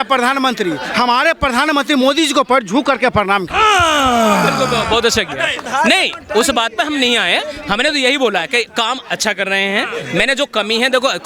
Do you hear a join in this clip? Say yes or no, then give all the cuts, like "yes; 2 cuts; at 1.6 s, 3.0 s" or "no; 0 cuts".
no; 0 cuts